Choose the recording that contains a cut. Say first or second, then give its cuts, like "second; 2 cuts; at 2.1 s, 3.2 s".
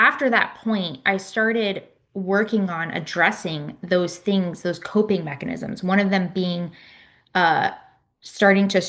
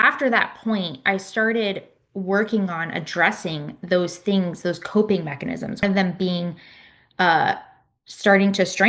second; 1 cut; at 5.8 s